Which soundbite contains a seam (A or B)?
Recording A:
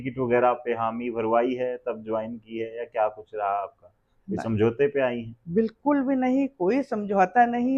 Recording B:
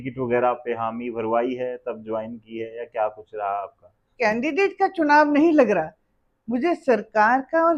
B